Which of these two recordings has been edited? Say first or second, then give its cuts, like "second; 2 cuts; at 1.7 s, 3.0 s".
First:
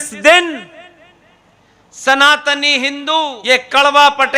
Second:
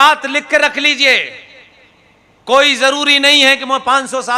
first; 1 cut; at 3.4 s